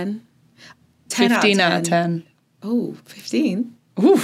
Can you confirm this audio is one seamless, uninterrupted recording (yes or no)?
yes